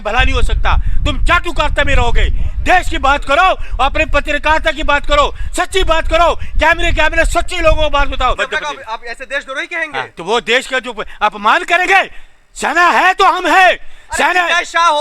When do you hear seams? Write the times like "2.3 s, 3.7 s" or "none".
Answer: 8.4 s